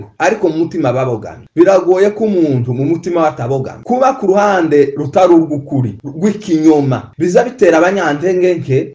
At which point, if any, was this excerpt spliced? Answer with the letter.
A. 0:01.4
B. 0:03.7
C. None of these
B